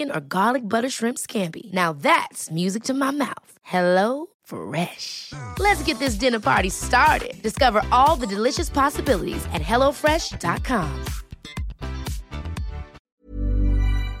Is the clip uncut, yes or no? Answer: no